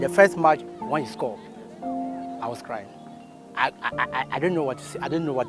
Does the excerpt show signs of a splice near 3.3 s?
yes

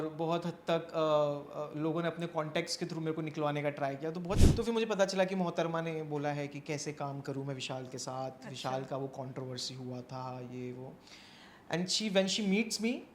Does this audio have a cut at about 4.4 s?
yes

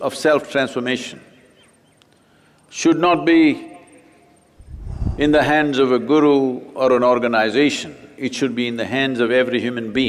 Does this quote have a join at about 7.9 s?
no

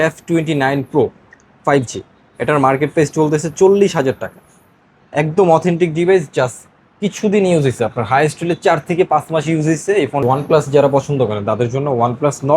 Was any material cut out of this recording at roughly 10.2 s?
yes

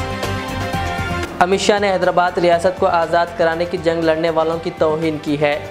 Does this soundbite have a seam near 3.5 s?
no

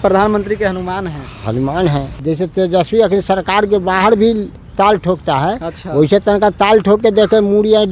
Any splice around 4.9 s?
no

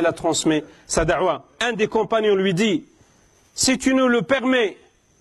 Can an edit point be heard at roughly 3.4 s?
no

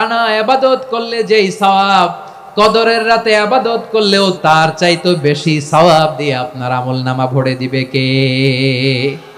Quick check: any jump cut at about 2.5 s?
no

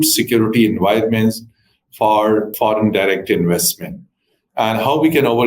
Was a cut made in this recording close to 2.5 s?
yes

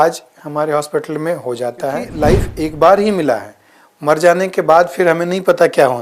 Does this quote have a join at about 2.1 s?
yes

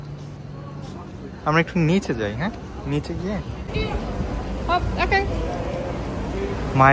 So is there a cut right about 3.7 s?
yes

